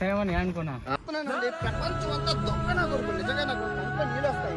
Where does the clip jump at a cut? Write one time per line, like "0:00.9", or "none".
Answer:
0:00.9